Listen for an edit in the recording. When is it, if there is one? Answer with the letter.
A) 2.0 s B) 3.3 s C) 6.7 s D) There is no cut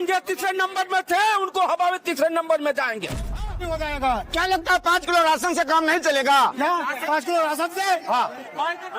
B